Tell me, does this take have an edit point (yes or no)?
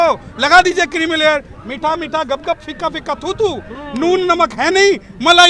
no